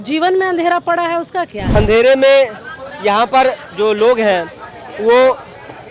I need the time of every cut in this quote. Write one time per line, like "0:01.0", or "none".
0:01.7